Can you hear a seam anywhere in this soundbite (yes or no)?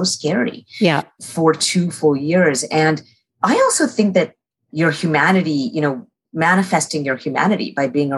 yes